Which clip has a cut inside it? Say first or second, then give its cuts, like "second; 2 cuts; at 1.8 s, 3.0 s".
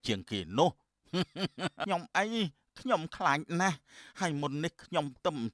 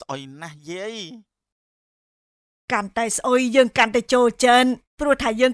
first; 1 cut; at 1.8 s